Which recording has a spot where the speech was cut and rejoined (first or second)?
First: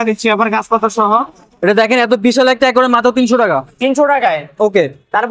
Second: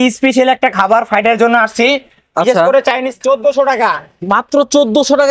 second